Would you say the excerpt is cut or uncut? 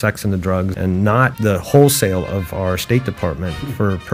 cut